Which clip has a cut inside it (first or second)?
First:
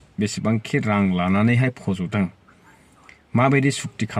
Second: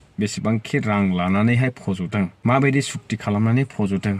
second